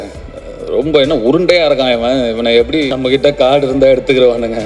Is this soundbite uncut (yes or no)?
no